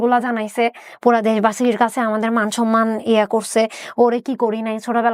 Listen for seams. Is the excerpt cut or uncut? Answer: uncut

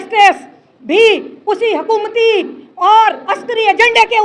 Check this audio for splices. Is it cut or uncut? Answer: uncut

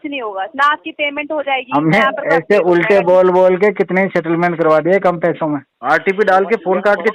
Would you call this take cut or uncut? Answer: cut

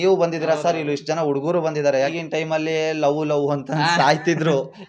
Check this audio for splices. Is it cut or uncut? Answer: cut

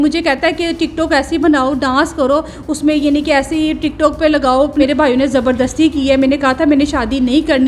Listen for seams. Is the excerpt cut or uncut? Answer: cut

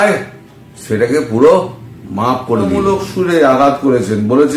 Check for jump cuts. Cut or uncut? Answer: cut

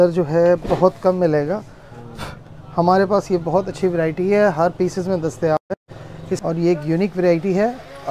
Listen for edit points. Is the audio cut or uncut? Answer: cut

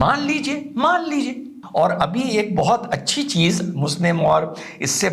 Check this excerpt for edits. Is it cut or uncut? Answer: cut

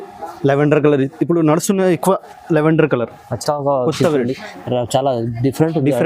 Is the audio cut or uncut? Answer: cut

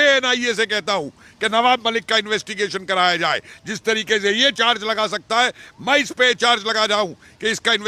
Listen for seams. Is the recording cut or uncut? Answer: uncut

